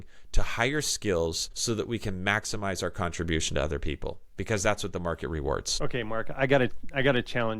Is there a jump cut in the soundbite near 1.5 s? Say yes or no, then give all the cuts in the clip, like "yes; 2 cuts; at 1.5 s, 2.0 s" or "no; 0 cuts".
yes; 2 cuts; at 1.5 s, 5.7 s